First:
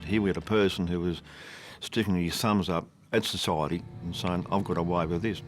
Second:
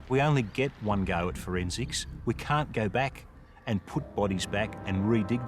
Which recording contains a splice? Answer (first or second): first